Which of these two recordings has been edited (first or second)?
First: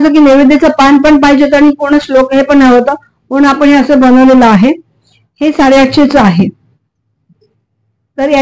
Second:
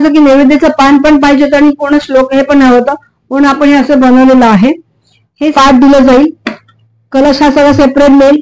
second